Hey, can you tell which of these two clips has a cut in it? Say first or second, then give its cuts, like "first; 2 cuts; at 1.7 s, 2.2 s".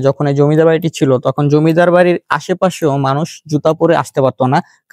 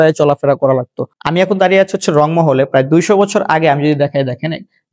second; 1 cut; at 1.0 s